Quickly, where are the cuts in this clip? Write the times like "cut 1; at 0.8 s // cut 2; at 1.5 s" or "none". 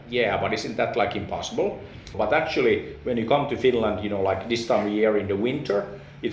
cut 1; at 2.1 s